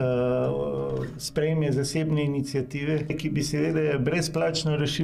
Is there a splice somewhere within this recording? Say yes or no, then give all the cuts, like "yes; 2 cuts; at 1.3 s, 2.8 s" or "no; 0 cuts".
yes; 1 cut; at 3.2 s